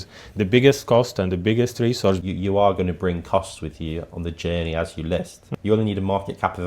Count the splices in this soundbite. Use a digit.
2